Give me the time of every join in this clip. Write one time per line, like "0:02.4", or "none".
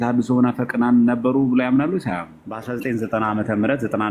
0:02.7